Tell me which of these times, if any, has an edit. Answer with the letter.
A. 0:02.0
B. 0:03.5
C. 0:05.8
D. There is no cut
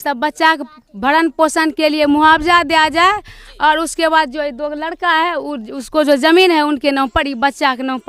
D